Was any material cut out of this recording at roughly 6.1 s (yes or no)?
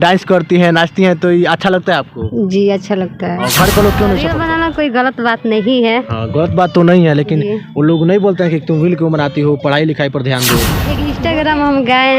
no